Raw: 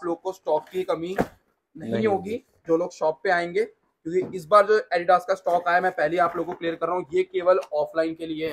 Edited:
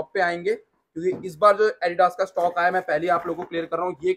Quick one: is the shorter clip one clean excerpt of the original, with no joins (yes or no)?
yes